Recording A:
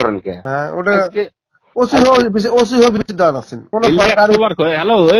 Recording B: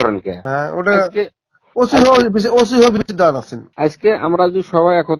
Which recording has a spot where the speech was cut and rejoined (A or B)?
A